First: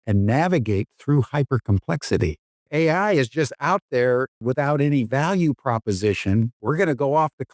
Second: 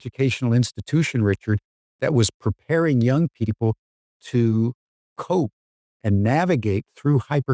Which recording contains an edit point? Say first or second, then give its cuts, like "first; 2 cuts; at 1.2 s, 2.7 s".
first; 3 cuts; at 2.5 s, 4.4 s, 6.5 s